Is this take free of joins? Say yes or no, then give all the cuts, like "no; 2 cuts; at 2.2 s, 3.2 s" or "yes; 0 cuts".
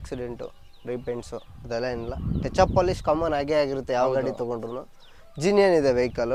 yes; 0 cuts